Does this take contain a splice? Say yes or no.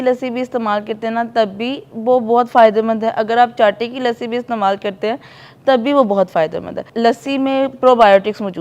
no